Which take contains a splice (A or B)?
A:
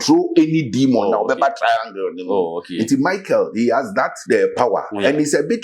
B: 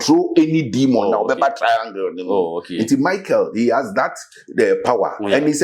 A